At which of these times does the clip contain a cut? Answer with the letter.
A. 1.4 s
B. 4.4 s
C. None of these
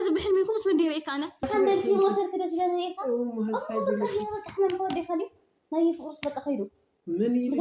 A